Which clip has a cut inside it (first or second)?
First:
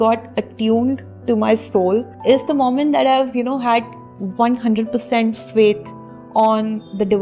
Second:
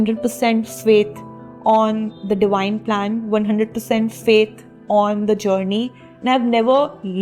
first